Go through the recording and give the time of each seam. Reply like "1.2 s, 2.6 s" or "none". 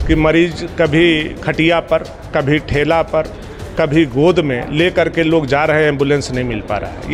none